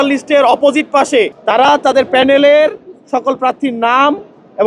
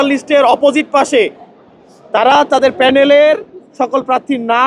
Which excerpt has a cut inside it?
first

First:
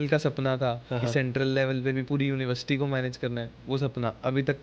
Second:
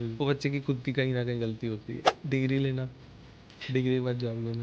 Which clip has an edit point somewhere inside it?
second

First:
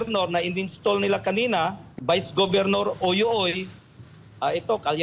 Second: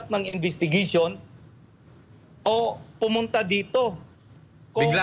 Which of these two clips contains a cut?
first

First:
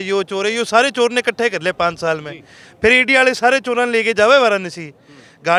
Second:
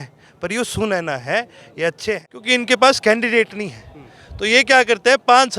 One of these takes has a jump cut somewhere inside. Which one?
second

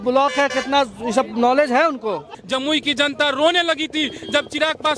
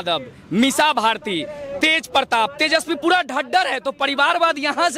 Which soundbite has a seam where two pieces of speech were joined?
first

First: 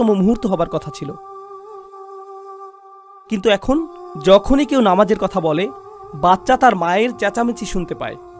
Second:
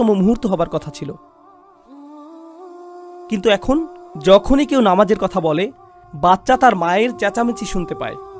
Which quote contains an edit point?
second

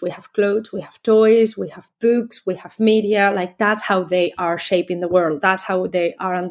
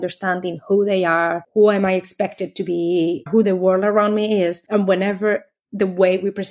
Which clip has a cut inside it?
second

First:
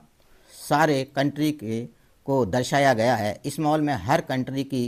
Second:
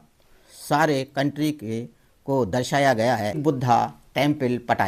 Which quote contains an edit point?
second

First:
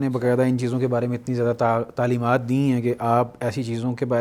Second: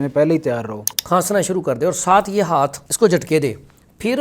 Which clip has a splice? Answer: second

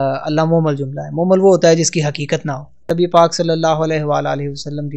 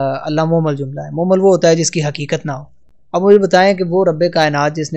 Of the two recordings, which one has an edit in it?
first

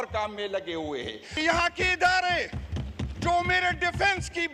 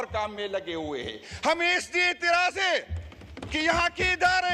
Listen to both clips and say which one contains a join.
first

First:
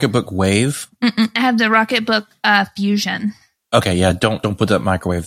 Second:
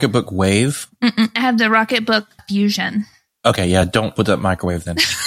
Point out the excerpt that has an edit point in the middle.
second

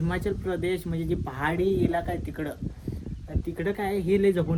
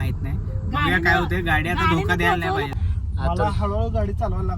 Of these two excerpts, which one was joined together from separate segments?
second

